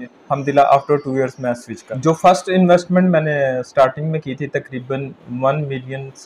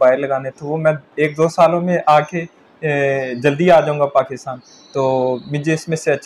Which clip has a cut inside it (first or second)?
first